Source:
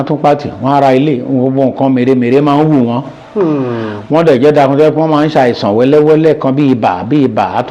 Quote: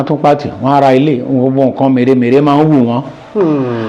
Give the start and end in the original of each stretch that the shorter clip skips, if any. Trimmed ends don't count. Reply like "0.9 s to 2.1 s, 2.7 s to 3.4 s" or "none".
none